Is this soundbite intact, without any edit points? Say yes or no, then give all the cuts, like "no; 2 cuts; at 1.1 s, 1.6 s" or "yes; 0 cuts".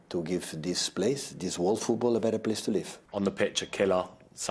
no; 1 cut; at 3.0 s